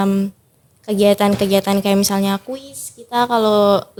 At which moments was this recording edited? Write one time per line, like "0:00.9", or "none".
none